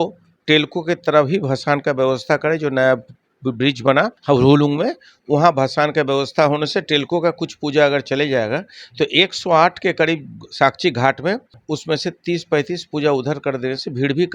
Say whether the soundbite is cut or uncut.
cut